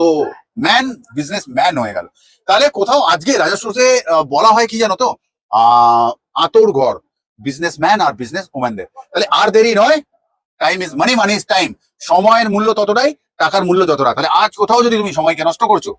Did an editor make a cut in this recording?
no; 0 cuts

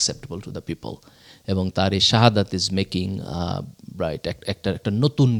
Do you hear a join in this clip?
no; 0 cuts

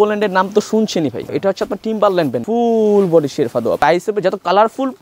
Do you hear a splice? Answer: yes; 3 cuts; at 1.2 s, 2.4 s, 3.8 s

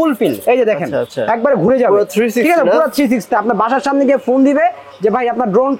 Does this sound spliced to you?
yes; 1 cut; at 3.3 s

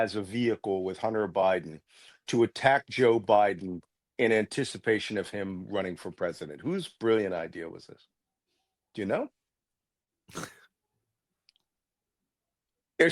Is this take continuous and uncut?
yes; 0 cuts

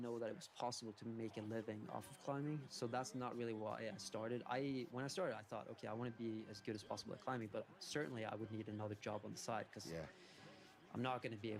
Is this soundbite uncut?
yes; 0 cuts

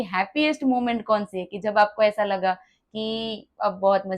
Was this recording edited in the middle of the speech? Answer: no; 0 cuts

